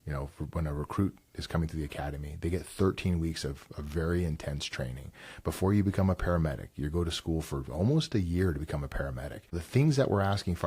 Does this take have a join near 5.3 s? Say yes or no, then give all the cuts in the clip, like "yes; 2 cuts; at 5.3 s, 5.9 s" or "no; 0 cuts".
no; 1 cut; at 9.6 s